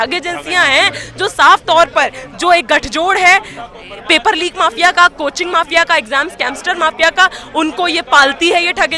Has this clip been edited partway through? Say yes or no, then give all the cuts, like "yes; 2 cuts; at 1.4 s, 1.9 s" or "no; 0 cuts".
no; 0 cuts